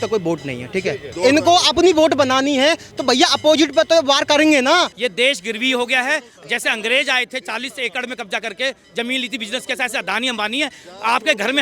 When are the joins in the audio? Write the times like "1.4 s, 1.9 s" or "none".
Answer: 1.1 s, 5.0 s